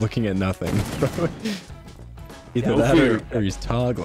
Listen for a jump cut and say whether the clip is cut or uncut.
uncut